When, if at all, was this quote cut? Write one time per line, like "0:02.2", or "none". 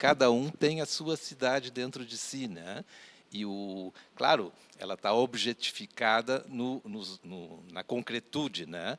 none